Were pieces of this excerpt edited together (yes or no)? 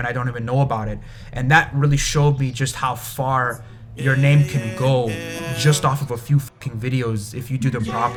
no